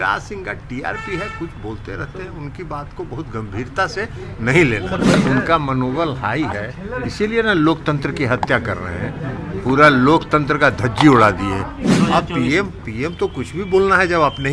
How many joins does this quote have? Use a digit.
2